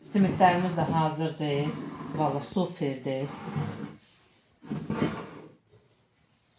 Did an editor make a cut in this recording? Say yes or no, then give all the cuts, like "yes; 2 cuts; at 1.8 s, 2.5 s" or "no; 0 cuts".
no; 0 cuts